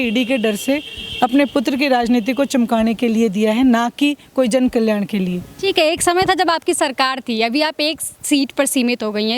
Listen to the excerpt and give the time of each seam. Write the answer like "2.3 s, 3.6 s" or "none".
none